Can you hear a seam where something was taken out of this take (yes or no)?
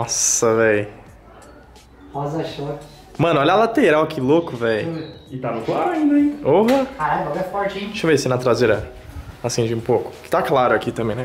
no